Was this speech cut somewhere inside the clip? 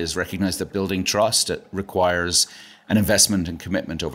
no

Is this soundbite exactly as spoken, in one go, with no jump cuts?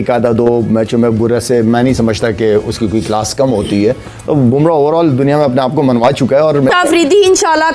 no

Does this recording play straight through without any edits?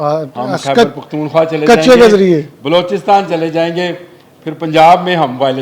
yes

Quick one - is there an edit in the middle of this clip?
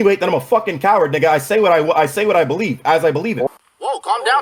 no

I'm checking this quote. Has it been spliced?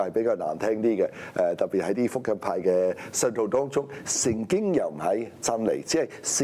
no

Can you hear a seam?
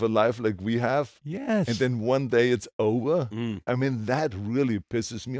no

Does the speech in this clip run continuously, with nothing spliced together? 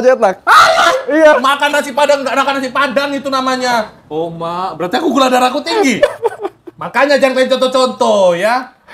no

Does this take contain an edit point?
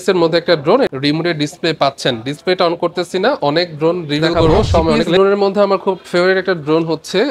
yes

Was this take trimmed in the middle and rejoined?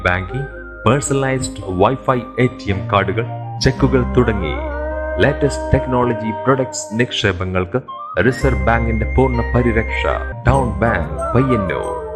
yes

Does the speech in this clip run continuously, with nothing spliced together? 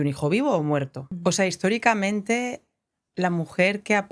no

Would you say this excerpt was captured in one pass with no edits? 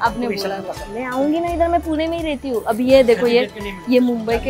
yes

